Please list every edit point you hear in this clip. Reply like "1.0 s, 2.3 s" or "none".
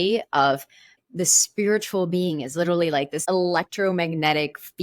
1.0 s, 3.2 s